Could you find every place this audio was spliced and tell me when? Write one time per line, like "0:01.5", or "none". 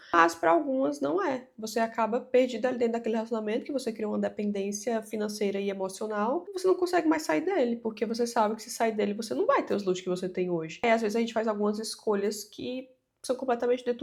none